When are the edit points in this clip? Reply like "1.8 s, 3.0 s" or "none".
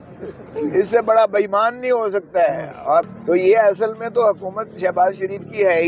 3.1 s